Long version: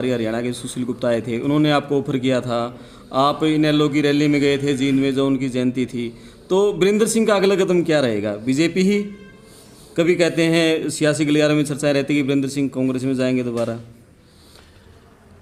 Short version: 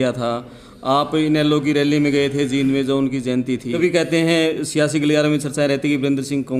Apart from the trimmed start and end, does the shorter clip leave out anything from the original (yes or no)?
yes